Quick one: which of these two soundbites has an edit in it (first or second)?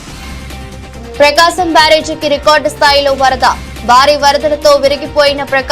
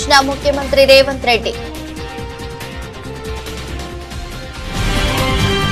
first